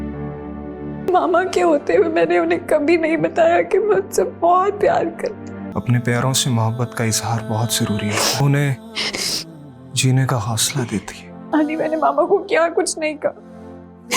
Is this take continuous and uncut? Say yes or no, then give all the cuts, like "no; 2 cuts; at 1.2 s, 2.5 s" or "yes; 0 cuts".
no; 4 cuts; at 1.1 s, 5.6 s, 8.4 s, 11.3 s